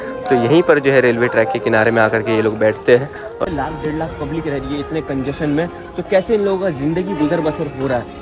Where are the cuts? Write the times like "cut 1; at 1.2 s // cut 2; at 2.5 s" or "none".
cut 1; at 3.4 s